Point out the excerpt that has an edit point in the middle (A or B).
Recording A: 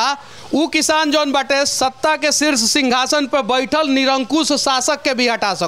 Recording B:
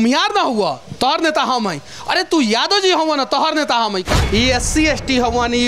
B